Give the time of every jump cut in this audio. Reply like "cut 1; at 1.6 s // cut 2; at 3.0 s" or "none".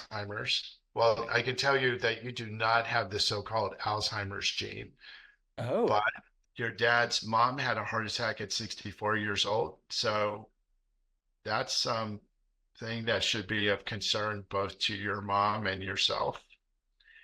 cut 1; at 6.4 s